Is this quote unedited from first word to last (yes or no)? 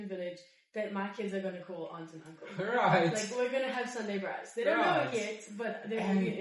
yes